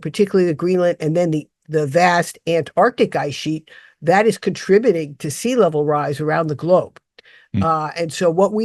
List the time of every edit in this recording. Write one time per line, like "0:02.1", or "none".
none

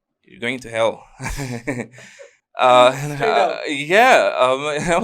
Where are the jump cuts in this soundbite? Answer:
none

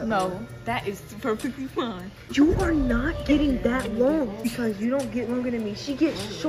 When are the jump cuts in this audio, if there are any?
0:02.2
0:04.4

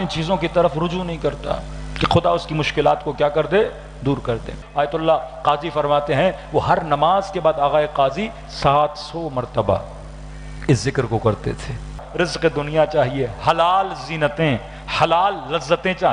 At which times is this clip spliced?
0:04.6
0:12.0

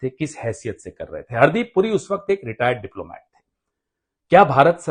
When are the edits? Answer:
none

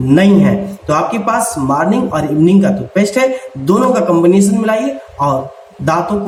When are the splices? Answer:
none

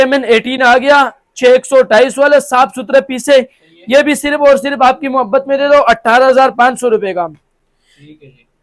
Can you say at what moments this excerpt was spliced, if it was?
none

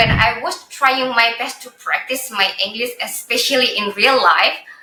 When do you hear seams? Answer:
none

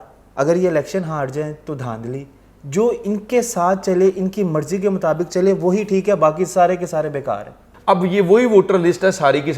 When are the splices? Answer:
0:07.7

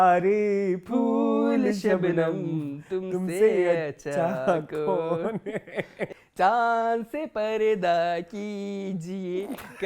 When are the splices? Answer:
0:06.2

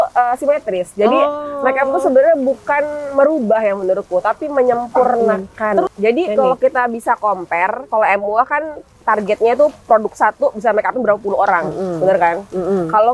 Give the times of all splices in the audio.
0:05.9

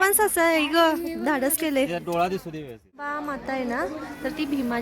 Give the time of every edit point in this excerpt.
0:03.2

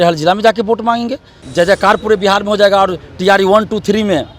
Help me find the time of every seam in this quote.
0:01.4

